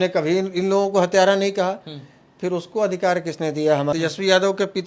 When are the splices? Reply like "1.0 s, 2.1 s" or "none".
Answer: 3.9 s

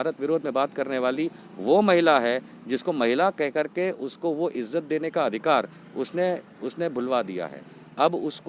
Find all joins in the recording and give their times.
none

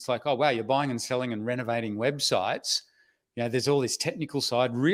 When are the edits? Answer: none

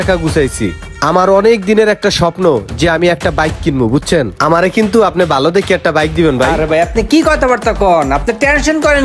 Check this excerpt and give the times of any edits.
none

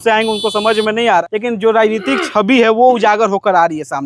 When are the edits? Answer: 1.2 s

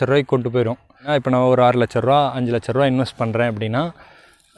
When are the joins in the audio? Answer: 1.0 s

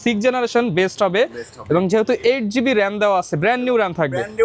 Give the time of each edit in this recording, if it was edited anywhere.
none

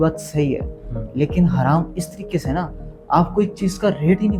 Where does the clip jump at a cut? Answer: none

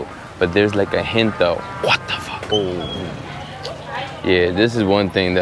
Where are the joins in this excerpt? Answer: 2.5 s

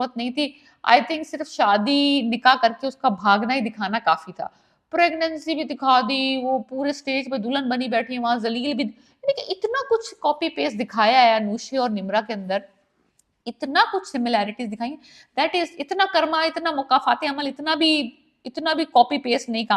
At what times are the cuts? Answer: none

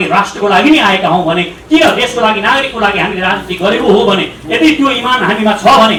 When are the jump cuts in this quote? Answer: none

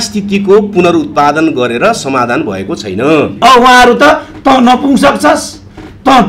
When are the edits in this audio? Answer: 3.4 s

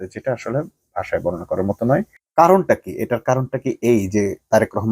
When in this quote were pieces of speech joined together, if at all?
2.2 s

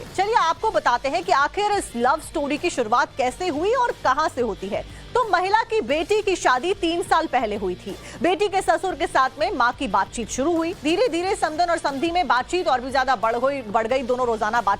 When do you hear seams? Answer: 2.9 s

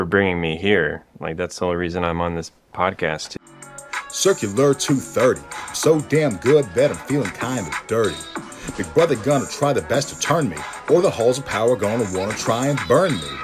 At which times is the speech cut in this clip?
3.3 s

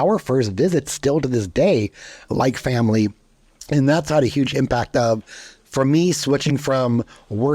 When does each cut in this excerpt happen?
2.3 s

